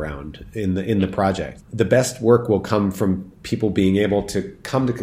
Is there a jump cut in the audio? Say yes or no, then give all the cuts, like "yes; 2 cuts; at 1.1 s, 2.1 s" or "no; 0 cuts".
yes; 1 cut; at 1.5 s